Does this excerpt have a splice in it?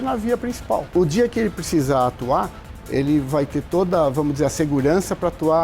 yes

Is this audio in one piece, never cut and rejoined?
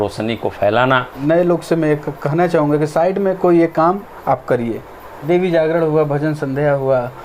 no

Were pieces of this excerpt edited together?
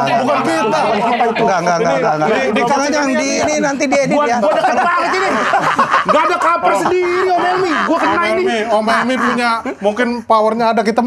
no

